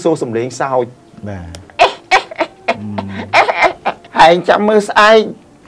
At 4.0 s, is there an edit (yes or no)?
yes